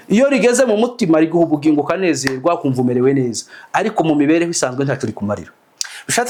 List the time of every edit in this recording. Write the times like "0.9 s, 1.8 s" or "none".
none